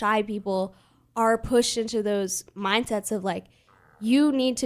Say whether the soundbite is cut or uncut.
uncut